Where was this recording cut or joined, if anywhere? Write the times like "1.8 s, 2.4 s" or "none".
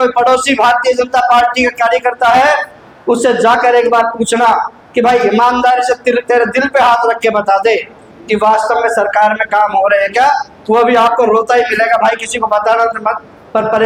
none